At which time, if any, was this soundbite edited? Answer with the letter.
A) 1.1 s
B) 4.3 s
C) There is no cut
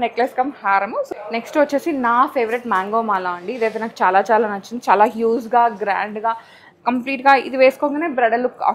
A